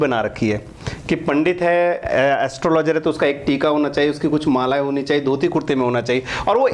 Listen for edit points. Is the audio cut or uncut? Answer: uncut